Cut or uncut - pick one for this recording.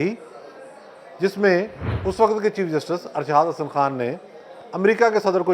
cut